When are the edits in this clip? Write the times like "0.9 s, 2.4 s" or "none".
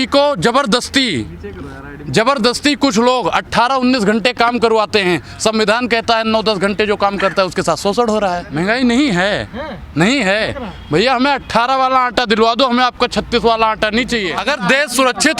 8.4 s, 14.3 s

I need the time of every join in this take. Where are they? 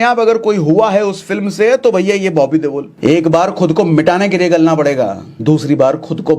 2.9 s, 5.3 s

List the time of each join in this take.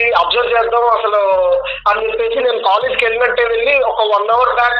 none

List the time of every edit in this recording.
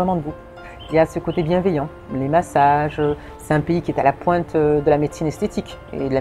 none

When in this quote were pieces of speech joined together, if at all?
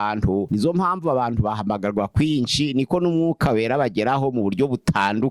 none

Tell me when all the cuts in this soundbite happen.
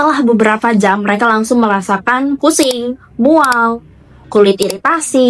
none

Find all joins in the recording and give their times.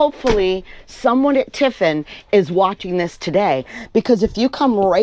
none

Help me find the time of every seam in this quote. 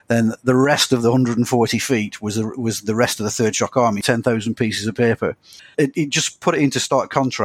4.0 s, 5.7 s

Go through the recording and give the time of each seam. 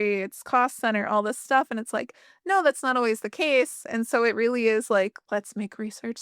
5.2 s

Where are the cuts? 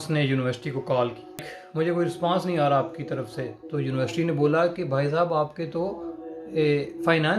1.6 s

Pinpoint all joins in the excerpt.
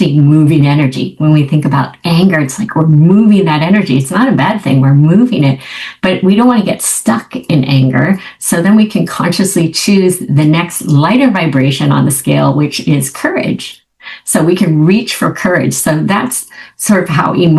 none

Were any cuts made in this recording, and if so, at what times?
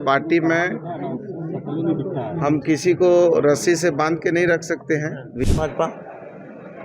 5.5 s

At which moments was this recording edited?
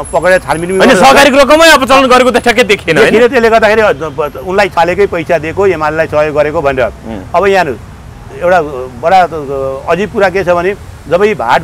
4.7 s

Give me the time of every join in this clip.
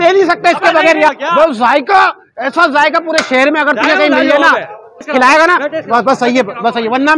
1.1 s, 5.0 s

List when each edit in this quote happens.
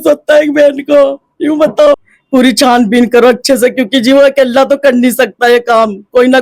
2.0 s

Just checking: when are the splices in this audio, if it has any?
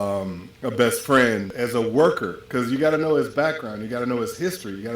1.5 s

